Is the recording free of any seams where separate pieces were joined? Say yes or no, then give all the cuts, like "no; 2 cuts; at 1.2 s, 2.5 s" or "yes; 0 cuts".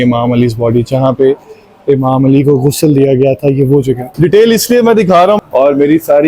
no; 2 cuts; at 4.0 s, 5.4 s